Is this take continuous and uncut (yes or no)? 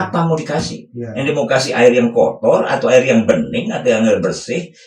yes